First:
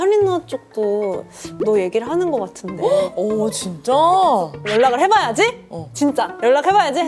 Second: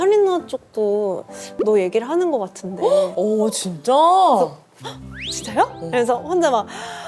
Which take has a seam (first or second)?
first